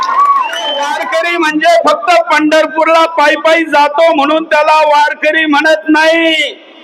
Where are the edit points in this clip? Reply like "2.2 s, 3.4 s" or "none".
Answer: 1.0 s